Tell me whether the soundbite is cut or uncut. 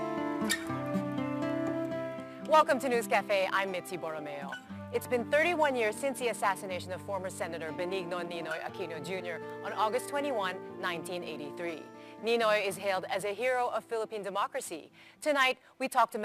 uncut